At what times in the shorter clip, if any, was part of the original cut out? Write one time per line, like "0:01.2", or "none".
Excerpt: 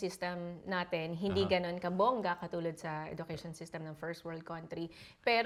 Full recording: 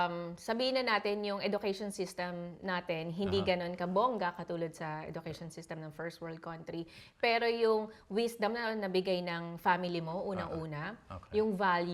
none